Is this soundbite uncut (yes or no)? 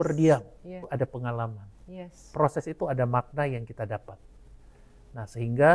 no